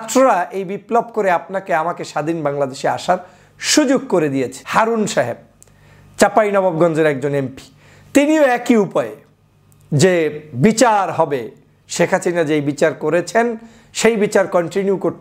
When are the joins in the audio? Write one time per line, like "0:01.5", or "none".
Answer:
0:04.6